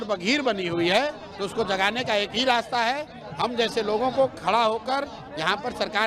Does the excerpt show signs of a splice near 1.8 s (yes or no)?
no